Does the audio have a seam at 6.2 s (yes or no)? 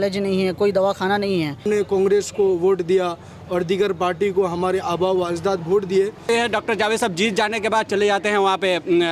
yes